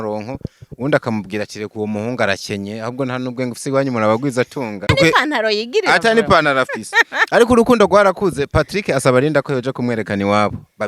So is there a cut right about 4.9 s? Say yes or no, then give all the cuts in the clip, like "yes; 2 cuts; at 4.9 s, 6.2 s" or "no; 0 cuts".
yes; 1 cut; at 4.9 s